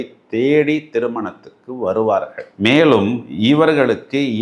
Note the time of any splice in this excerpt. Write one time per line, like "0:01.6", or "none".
none